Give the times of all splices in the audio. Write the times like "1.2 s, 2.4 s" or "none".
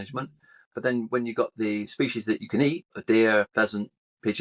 2.9 s, 3.5 s